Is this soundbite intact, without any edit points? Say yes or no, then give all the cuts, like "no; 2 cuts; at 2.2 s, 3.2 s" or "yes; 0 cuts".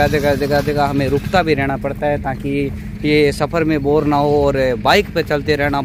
yes; 0 cuts